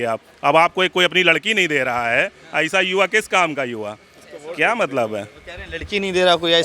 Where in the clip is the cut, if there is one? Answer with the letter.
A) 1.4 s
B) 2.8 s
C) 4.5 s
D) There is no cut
D